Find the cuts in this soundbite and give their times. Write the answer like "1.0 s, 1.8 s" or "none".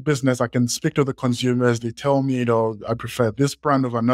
none